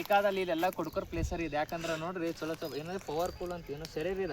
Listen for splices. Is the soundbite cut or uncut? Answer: cut